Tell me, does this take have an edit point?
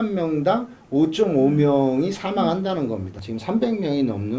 yes; 1 cut; at 3.1 s

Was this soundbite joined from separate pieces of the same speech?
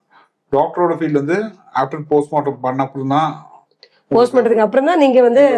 no; 0 cuts

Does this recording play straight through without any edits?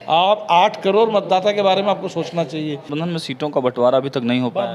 no; 1 cut; at 2.9 s

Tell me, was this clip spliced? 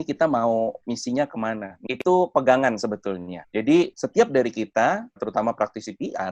yes; 3 cuts; at 1.8 s, 4.0 s, 5.2 s

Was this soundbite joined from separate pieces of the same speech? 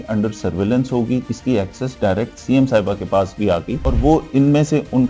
yes; 2 cuts; at 1.2 s, 3.8 s

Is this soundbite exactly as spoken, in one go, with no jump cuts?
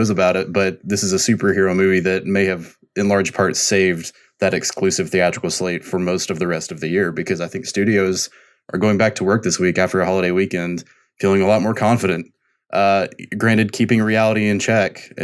yes; 0 cuts

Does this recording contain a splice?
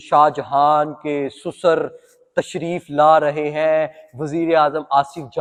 no; 0 cuts

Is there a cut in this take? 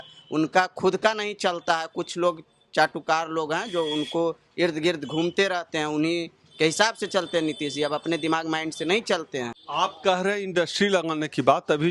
yes; 1 cut; at 9.6 s

